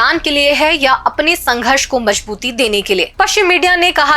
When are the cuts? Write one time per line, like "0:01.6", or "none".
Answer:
0:03.1